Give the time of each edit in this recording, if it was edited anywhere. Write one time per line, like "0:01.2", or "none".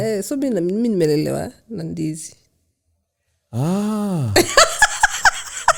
none